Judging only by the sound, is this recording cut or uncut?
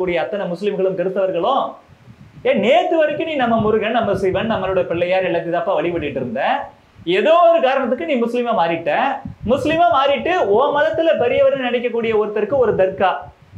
uncut